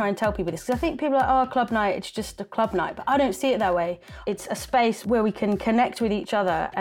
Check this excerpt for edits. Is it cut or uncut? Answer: cut